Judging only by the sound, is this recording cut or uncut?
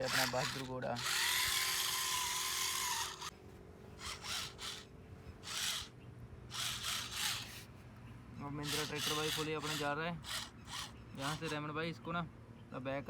cut